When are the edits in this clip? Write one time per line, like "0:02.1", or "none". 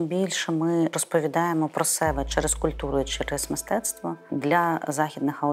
0:01.0
0:04.3